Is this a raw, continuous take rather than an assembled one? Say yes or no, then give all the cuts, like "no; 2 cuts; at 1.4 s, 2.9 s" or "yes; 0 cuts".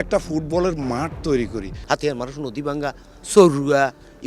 no; 1 cut; at 1.7 s